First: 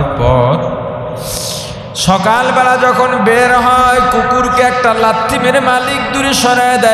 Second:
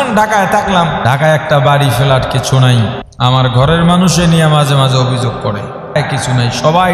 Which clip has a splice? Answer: second; 3 cuts; at 1.0 s, 3.0 s, 6.0 s

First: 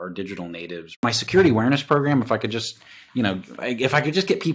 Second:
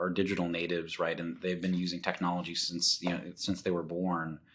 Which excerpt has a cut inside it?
first; 1 cut; at 1.0 s

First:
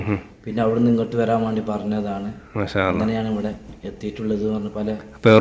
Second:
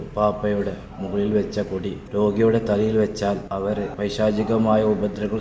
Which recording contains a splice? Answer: second; 2 cuts; at 2.0 s, 3.6 s

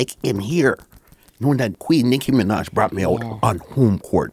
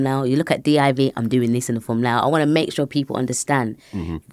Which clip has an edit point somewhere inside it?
first; 1 cut; at 1.8 s

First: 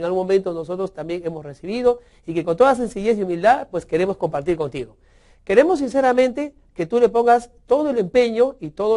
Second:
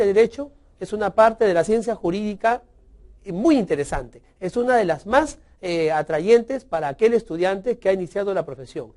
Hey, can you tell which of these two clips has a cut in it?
first; 1 cut; at 7.6 s

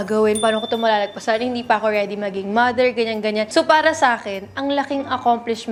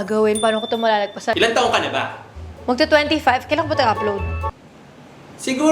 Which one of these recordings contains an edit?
second; 1 cut; at 1.3 s

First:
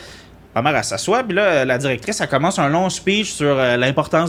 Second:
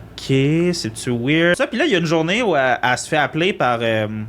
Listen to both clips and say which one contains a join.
second; 1 cut; at 1.5 s

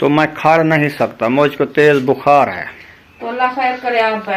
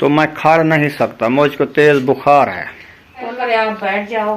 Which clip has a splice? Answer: second; 1 cut; at 3.3 s

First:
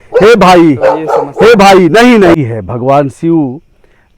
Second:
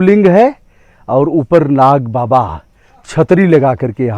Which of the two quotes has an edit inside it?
first; 1 cut; at 2.4 s

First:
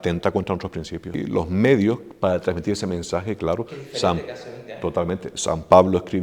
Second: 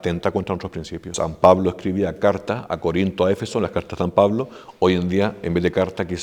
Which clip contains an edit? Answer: second; 1 cut; at 1.0 s

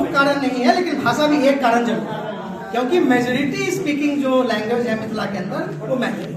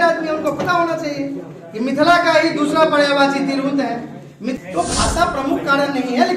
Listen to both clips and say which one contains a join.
second; 1 cut; at 4.5 s

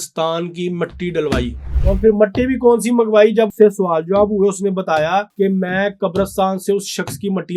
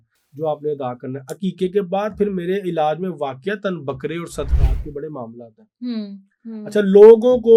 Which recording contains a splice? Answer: first; 3 cuts; at 1.7 s, 3.5 s, 5.3 s

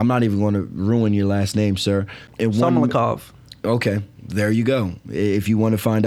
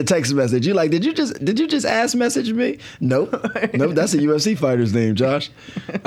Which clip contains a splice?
first; 1 cut; at 2.3 s

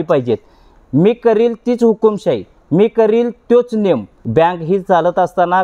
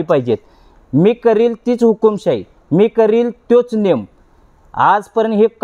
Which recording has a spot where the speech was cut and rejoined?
first; 1 cut; at 4.1 s

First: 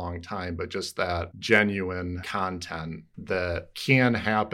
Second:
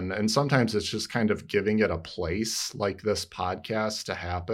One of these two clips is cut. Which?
first; 3 cuts; at 1.3 s, 2.3 s, 3.7 s

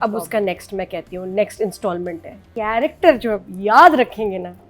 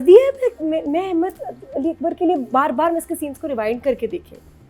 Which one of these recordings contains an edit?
first; 1 cut; at 2.4 s

